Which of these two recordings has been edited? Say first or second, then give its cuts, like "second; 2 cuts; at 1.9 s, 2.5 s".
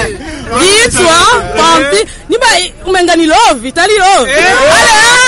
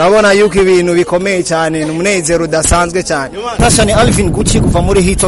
second; 1 cut; at 3.6 s